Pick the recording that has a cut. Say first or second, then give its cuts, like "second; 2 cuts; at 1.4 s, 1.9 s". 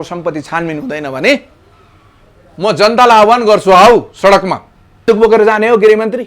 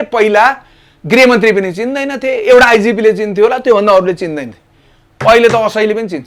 first; 1 cut; at 5.0 s